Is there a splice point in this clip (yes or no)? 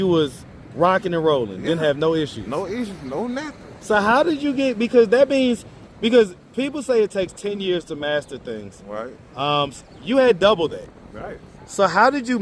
no